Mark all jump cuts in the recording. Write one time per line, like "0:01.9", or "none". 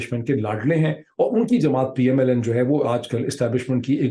none